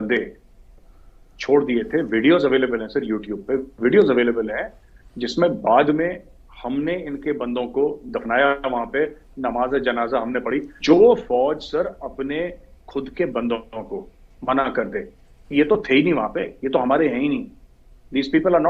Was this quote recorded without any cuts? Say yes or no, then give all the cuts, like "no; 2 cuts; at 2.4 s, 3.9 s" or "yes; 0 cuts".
no; 1 cut; at 10.7 s